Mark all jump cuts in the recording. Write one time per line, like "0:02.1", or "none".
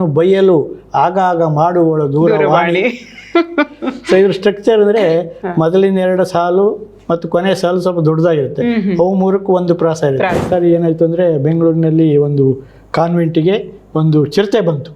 0:10.4